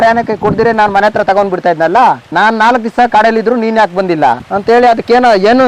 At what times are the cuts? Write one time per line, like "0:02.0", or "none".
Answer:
none

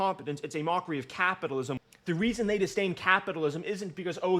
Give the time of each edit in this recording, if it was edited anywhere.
0:01.8

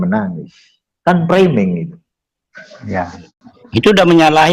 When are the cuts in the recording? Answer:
0:03.2

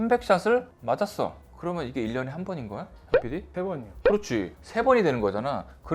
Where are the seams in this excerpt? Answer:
none

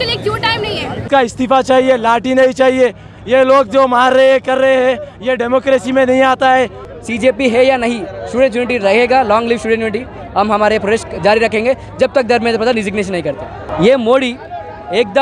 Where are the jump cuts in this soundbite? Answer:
0:01.0
0:06.8
0:13.6

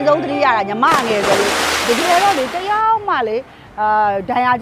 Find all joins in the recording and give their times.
0:01.8

